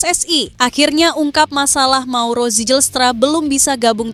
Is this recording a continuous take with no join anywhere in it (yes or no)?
yes